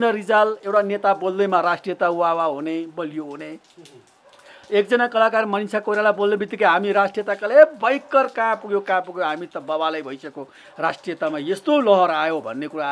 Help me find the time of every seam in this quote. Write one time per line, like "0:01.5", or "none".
none